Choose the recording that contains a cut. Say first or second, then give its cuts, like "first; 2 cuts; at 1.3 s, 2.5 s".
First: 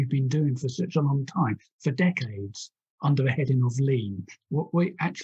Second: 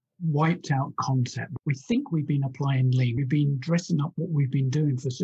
second; 2 cuts; at 1.4 s, 3.2 s